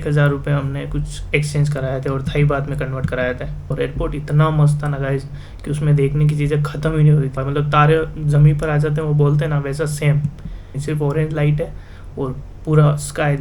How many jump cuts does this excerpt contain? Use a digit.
3